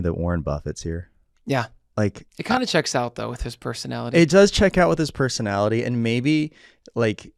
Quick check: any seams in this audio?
no; 0 cuts

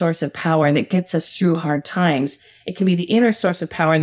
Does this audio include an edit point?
no; 0 cuts

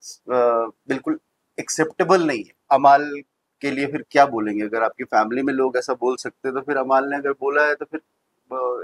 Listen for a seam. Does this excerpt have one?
yes; 1 cut; at 2.7 s

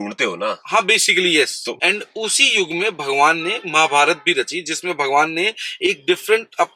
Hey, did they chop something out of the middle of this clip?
yes; 1 cut; at 1.8 s

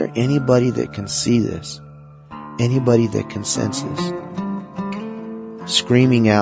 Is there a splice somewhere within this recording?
yes; 2 cuts; at 4.2 s, 5.5 s

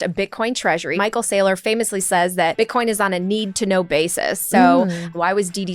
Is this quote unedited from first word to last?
no; 2 cuts; at 0.9 s, 2.5 s

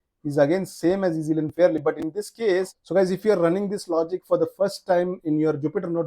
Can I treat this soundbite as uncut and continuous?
no; 1 cut; at 2.8 s

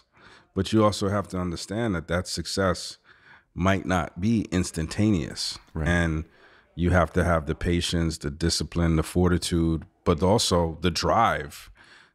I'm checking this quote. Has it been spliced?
no; 0 cuts

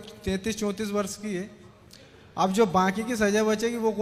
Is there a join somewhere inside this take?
no; 0 cuts

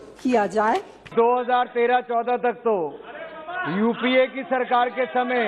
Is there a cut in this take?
yes; 1 cut; at 1.1 s

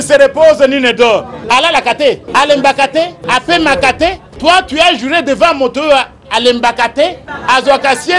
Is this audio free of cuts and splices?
yes; 0 cuts

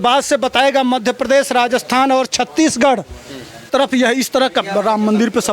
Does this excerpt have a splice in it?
yes; 1 cut; at 3.7 s

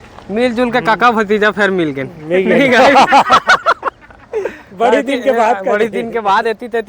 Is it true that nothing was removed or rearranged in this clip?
yes; 0 cuts

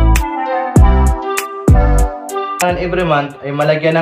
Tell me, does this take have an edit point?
yes; 1 cut; at 2.6 s

